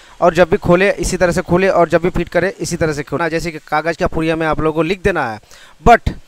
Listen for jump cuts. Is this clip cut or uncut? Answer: uncut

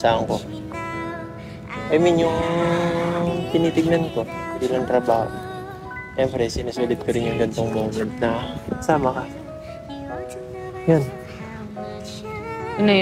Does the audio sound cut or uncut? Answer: uncut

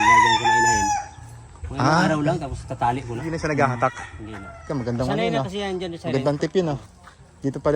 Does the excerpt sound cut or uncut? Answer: cut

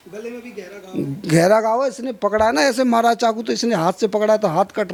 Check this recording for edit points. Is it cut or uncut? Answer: uncut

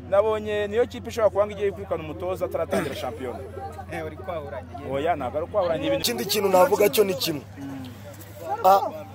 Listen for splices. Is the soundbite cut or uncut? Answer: cut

